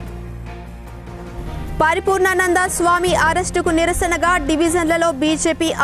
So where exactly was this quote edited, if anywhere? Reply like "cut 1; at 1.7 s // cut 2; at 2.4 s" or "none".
cut 1; at 1.3 s